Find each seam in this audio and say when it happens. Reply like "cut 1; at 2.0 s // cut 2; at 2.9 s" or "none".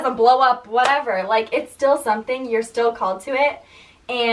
none